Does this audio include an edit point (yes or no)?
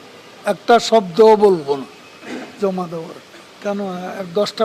yes